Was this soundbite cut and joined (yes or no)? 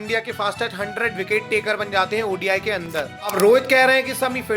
yes